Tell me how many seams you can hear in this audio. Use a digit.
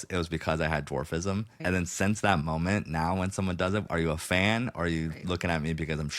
2